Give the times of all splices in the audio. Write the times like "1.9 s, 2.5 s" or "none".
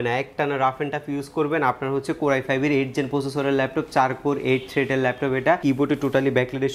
5.6 s